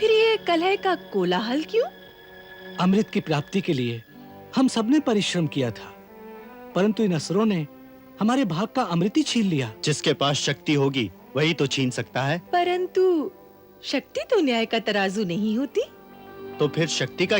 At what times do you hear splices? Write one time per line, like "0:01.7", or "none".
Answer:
0:09.7
0:12.4

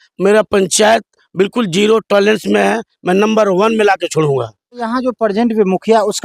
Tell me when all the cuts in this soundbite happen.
0:04.8

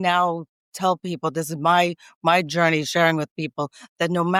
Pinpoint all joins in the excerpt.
none

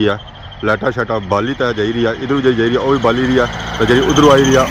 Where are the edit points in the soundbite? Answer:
none

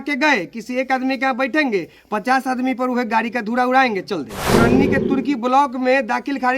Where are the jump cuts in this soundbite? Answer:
0:04.4

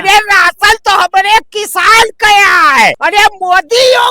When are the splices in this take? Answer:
0:03.0

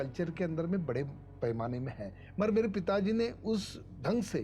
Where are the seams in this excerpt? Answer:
none

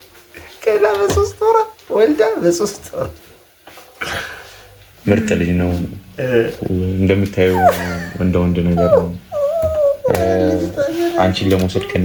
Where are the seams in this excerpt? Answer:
none

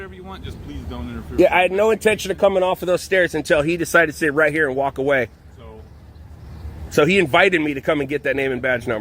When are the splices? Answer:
none

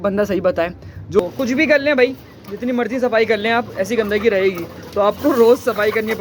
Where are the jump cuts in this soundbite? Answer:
0:01.2

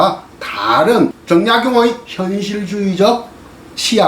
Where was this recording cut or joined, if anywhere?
0:01.2

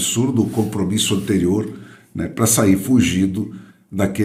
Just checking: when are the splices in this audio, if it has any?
none

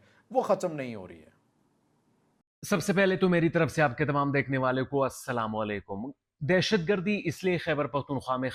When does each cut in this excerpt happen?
none

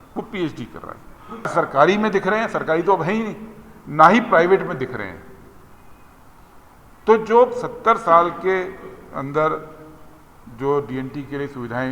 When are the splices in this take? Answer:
0:01.5

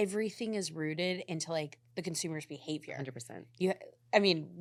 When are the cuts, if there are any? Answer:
none

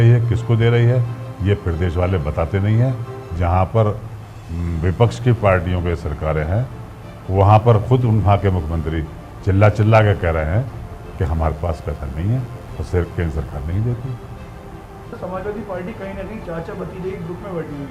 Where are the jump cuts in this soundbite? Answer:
0:15.2

